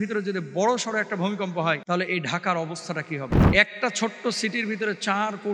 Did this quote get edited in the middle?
yes; 2 cuts; at 1.8 s, 3.4 s

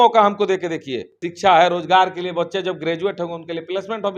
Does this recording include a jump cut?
yes; 1 cut; at 1.3 s

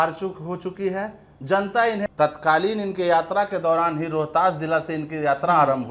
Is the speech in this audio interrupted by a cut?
yes; 1 cut; at 2.0 s

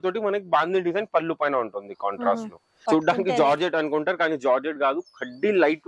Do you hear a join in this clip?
yes; 1 cut; at 2.7 s

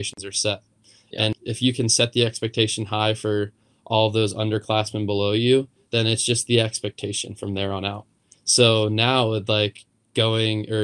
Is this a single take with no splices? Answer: no; 1 cut; at 1.3 s

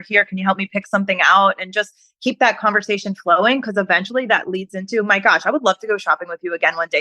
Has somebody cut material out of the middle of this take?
no; 0 cuts

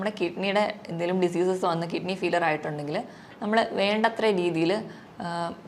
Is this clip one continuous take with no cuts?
yes; 0 cuts

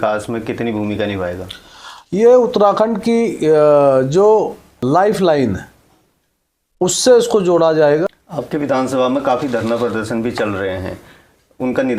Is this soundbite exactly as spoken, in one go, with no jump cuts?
no; 1 cut; at 8.1 s

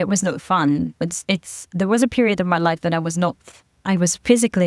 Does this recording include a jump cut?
no; 0 cuts

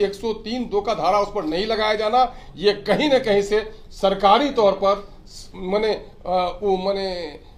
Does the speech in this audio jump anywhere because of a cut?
no; 0 cuts

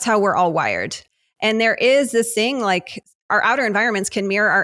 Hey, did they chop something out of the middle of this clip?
yes; 2 cuts; at 1.0 s, 3.3 s

